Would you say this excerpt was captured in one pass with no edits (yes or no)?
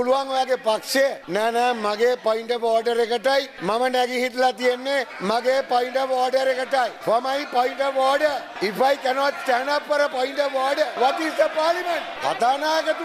no